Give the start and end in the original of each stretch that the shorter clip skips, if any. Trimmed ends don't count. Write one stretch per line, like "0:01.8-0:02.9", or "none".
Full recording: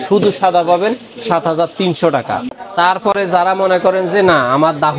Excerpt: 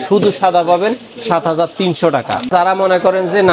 0:02.5-0:03.3